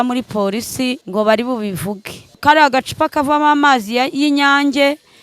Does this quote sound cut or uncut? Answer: cut